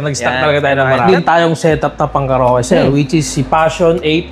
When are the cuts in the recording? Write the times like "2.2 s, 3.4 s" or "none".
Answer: 1.0 s